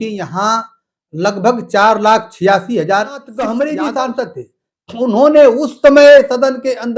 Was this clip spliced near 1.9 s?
no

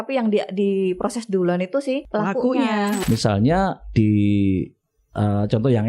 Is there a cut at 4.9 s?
no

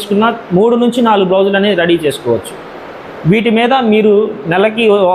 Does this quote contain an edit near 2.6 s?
no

